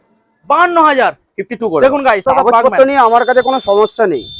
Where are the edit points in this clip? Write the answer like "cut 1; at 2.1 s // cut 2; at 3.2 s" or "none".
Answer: cut 1; at 2.2 s